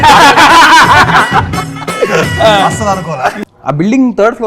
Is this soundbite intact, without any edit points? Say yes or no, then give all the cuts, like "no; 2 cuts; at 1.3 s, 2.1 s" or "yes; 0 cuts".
no; 1 cut; at 3.4 s